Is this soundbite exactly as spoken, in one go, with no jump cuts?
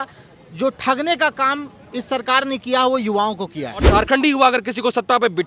no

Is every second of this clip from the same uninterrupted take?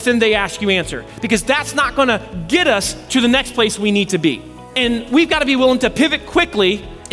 yes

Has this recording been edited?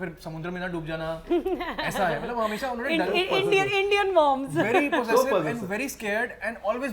no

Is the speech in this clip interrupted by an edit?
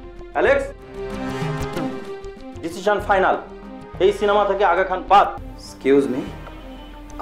yes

